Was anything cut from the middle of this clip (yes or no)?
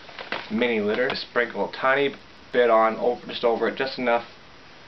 yes